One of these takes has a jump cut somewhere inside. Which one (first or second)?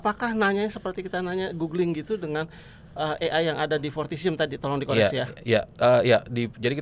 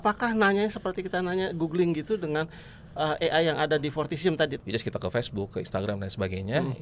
second